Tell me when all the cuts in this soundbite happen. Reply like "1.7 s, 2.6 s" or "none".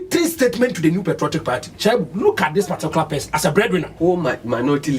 1.7 s, 3.9 s